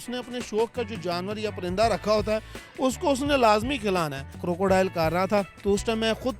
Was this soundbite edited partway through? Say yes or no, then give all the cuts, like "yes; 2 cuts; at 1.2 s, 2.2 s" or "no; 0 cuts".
yes; 2 cuts; at 4.4 s, 5.5 s